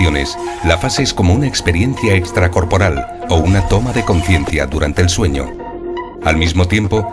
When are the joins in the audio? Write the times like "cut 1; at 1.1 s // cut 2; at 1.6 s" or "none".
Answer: cut 1; at 4.0 s